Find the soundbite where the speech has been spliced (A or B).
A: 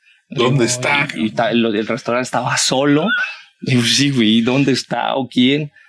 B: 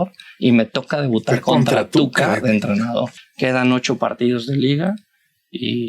B